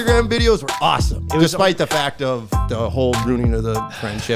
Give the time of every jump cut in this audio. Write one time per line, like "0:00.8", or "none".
0:01.2
0:02.6